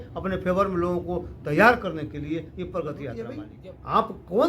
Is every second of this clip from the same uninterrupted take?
no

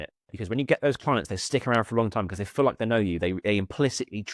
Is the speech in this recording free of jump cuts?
yes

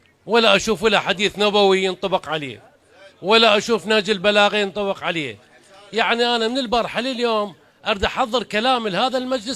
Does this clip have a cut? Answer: no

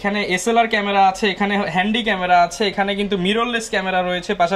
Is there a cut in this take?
no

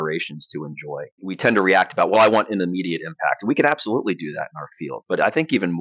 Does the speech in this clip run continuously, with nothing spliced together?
no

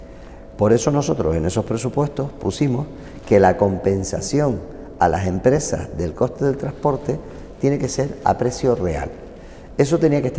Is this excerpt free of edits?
yes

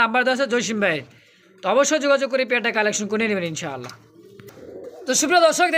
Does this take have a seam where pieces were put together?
no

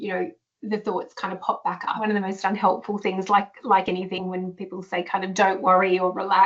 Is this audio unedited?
no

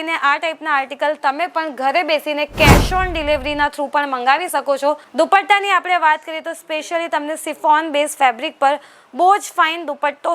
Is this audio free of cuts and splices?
no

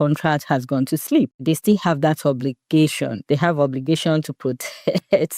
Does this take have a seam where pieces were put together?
yes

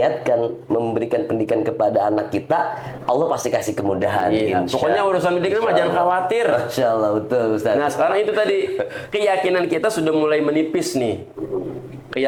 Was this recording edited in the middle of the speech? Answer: no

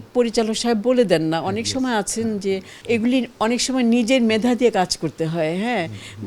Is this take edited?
yes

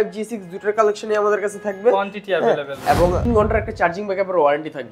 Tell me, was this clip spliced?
yes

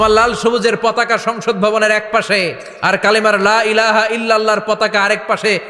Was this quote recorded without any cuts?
no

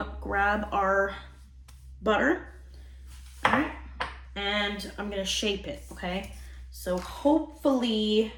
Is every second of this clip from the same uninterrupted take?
yes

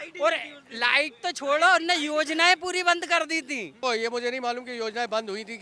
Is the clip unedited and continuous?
no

